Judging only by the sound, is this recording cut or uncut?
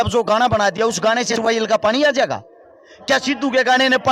cut